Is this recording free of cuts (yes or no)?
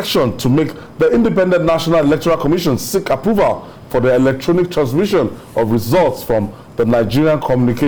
yes